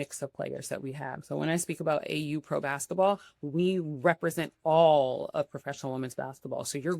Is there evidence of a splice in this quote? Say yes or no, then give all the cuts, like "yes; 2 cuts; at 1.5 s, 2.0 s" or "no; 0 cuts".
no; 0 cuts